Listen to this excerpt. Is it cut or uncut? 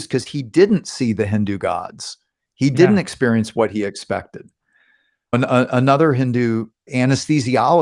cut